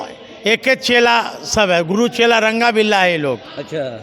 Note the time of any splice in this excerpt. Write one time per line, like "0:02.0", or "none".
none